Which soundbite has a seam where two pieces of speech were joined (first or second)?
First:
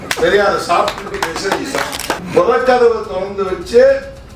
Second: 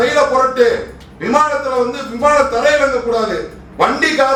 first